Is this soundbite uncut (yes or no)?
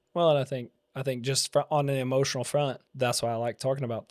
no